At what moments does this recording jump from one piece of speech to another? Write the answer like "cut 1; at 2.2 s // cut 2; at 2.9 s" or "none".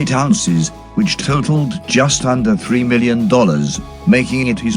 cut 1; at 3.9 s

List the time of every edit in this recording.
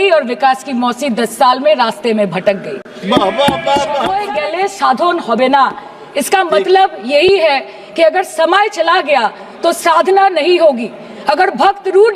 cut 1; at 4.1 s

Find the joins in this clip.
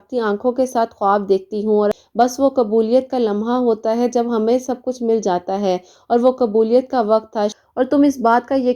cut 1; at 2.0 s // cut 2; at 7.5 s

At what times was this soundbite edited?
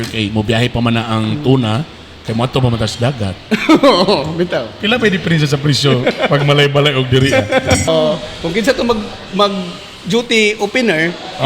cut 1; at 7.9 s

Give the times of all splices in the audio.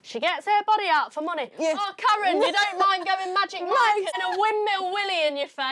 cut 1; at 4.2 s

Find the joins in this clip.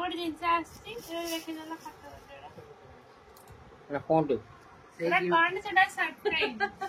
none

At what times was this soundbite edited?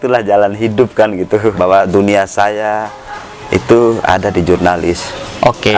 cut 1; at 1.6 s

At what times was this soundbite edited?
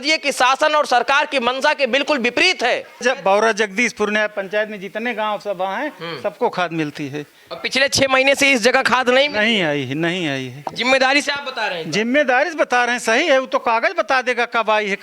cut 1; at 3.0 s

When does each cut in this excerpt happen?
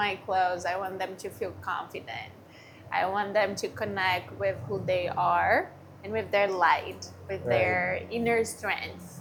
none

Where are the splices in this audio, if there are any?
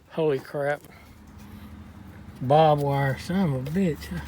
cut 1; at 1.1 s

